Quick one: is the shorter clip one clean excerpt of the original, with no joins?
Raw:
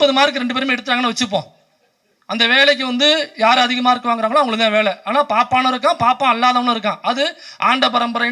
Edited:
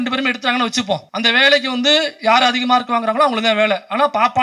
no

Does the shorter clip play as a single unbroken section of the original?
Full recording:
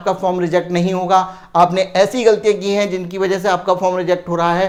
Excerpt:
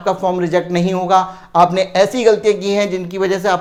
yes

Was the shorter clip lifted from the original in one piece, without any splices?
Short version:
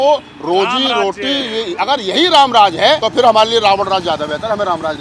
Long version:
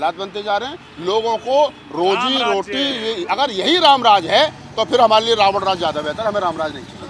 no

